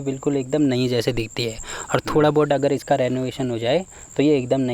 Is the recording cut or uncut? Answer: uncut